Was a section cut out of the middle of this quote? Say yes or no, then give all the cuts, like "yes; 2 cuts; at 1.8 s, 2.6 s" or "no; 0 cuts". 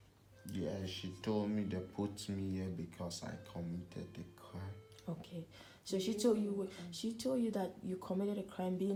no; 0 cuts